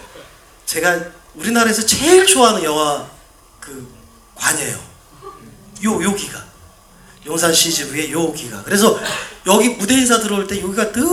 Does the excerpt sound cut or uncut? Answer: uncut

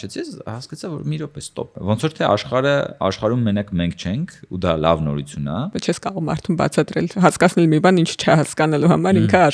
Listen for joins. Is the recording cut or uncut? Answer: cut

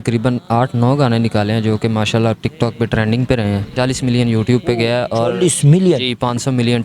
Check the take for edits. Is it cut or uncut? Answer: cut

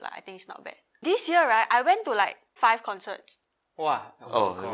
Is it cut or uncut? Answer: cut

